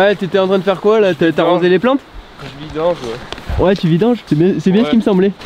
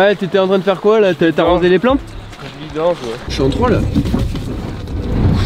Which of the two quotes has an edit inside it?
second; 1 cut; at 3.3 s

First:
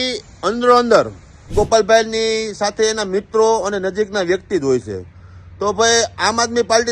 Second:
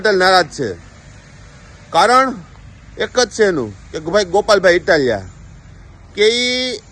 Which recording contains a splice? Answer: first; 1 cut; at 1.5 s

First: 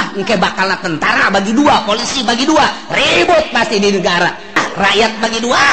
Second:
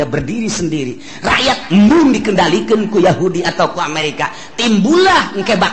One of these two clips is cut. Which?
first; 1 cut; at 4.6 s

